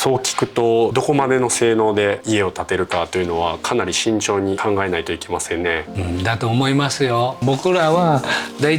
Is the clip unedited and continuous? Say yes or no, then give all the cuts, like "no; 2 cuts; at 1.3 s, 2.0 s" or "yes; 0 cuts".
no; 5 cuts; at 0.9 s, 2.2 s, 4.6 s, 5.9 s, 7.4 s